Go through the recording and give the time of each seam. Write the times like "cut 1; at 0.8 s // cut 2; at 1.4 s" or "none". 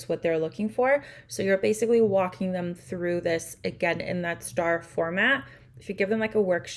none